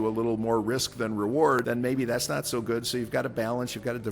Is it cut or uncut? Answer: cut